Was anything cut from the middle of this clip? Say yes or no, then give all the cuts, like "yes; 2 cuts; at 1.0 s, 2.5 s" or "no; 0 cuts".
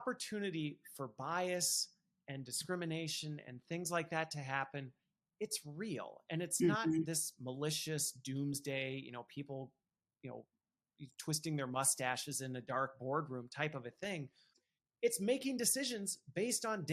yes; 1 cut; at 14.6 s